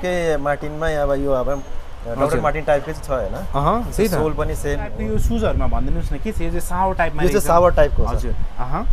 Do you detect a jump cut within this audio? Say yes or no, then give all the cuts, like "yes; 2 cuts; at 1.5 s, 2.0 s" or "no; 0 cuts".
yes; 1 cut; at 5.0 s